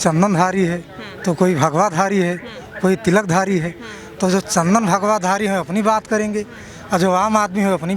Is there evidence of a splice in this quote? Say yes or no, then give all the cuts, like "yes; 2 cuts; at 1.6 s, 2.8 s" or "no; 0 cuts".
no; 0 cuts